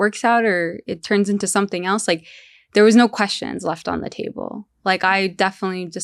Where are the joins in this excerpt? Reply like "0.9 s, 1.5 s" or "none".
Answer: none